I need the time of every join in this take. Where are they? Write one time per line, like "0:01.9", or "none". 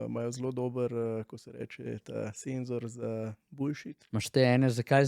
0:03.9